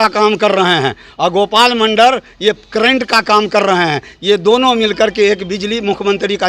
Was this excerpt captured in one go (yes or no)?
yes